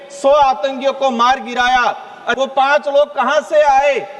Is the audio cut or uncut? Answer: cut